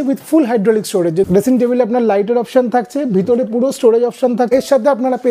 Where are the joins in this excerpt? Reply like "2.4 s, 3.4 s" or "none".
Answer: 1.3 s, 4.5 s